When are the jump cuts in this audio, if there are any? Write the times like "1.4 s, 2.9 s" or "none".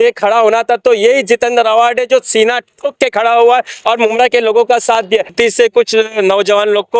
5.3 s